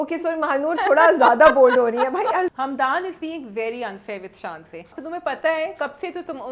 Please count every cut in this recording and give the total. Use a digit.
2